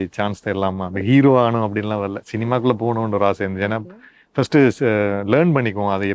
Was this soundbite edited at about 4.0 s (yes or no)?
no